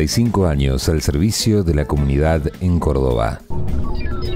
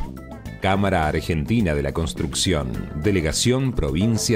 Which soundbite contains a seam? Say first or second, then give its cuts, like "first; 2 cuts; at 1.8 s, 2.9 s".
first; 1 cut; at 3.4 s